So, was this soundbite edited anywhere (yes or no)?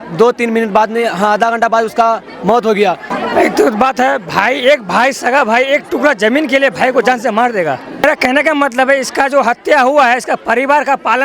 yes